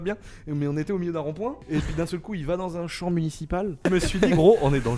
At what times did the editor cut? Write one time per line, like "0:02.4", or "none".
0:01.6
0:03.8